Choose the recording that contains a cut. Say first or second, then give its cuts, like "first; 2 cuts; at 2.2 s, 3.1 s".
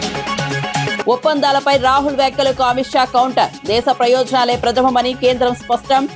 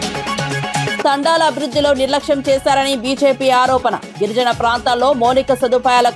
second; 1 cut; at 1.0 s